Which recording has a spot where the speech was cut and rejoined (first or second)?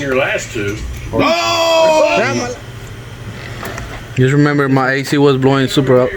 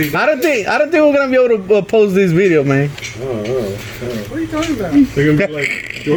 first